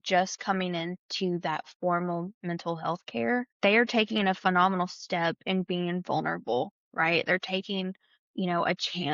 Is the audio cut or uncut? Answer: cut